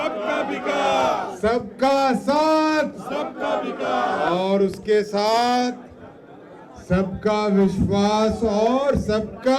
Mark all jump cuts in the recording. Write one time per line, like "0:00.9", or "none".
none

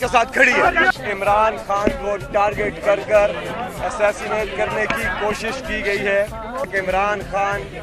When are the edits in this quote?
0:00.9
0:06.7

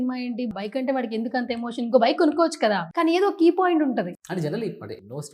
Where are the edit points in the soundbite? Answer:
0:04.2

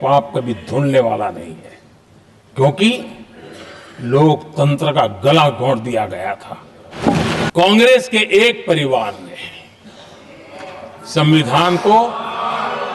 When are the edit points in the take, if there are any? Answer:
0:07.0

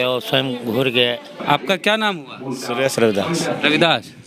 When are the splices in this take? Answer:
0:01.3

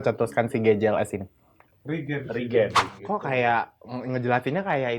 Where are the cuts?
0:02.8

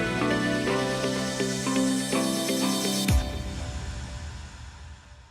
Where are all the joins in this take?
0:01.2

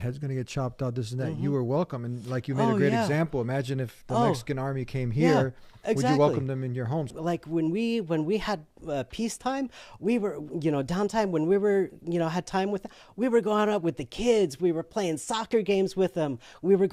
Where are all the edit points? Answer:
none

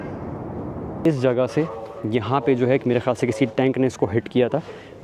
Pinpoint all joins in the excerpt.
0:01.0

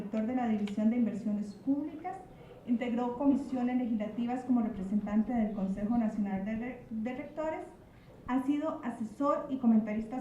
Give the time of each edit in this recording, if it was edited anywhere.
0:02.3

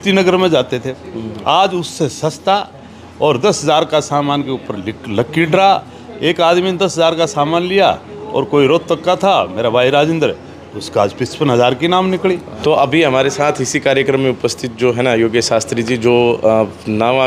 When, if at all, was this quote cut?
none

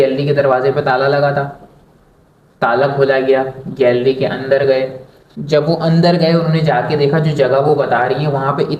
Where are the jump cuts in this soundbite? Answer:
none

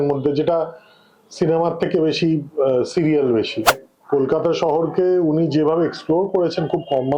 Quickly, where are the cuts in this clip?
0:03.7

